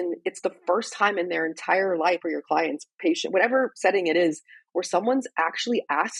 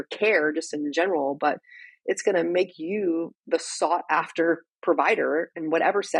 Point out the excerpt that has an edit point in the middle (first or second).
first